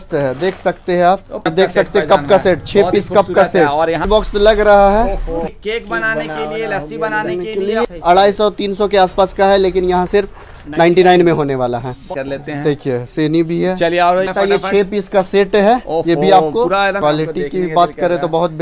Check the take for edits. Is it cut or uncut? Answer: cut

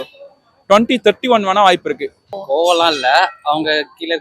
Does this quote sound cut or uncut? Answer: cut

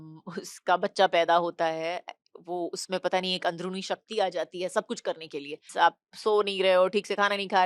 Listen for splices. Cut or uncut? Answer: cut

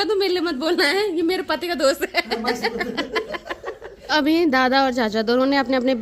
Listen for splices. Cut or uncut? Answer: uncut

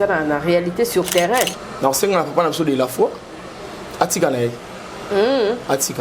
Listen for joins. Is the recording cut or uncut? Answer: cut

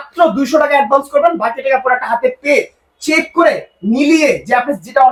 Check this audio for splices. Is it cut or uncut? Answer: uncut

